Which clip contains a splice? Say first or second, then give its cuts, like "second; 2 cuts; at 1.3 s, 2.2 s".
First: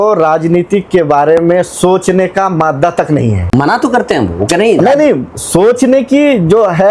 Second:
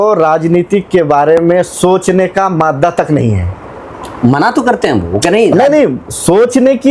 first; 1 cut; at 3.5 s